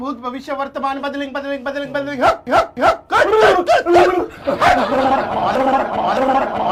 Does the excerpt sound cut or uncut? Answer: uncut